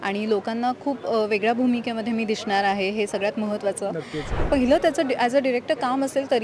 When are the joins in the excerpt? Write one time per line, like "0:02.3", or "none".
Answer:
0:04.4